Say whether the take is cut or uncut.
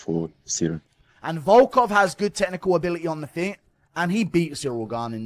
cut